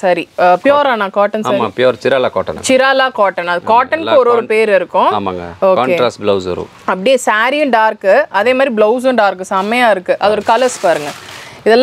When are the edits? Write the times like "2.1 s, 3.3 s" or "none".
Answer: none